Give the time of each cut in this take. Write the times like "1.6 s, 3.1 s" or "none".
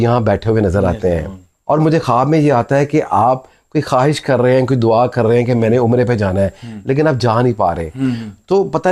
none